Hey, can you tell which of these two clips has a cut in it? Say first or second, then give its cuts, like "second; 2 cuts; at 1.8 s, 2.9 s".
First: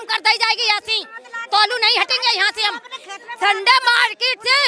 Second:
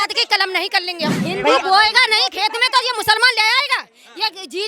second; 1 cut; at 1.1 s